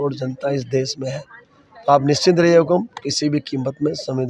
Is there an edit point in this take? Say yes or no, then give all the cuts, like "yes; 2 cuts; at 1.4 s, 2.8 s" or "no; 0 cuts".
no; 0 cuts